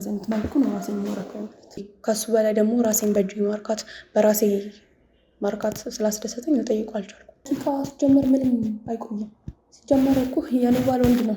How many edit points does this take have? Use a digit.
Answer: 2